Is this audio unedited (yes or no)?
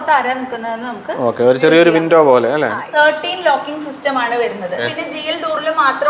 no